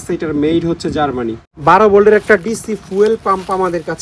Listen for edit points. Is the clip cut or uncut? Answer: cut